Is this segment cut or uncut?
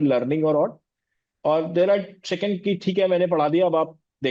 uncut